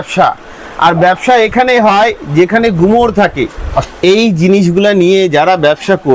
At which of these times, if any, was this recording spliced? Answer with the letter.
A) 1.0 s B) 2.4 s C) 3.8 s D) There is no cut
C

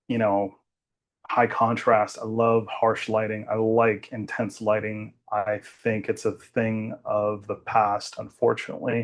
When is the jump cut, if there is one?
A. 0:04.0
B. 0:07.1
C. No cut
C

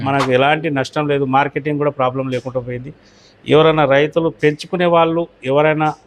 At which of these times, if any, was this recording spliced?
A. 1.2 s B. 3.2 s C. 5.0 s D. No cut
D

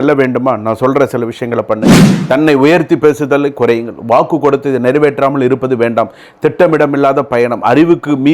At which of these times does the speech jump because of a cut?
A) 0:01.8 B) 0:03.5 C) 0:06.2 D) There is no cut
A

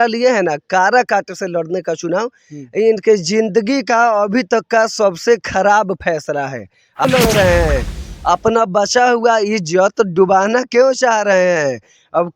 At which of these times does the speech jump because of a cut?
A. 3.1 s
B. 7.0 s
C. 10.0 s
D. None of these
B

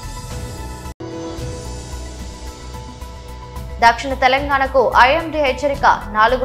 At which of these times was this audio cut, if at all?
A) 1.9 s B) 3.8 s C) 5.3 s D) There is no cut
B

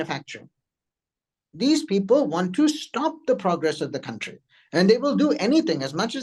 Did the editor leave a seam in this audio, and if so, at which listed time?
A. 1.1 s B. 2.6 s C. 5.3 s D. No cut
D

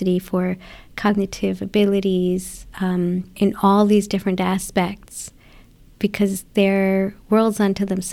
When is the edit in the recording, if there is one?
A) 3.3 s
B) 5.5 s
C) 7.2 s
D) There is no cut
A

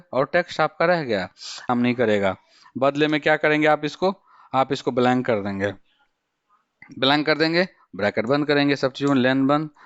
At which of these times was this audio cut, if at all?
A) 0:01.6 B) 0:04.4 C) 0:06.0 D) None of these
A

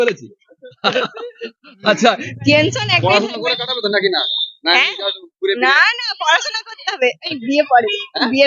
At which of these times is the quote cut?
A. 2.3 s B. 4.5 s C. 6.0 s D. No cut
A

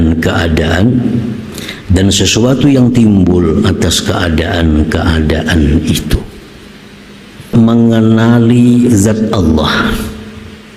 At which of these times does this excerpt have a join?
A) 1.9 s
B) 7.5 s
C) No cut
B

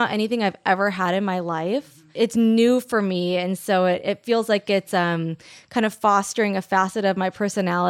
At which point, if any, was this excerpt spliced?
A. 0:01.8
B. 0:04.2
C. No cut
A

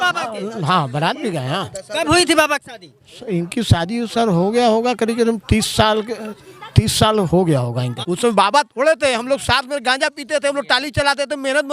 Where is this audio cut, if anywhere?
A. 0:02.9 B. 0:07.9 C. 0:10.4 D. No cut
B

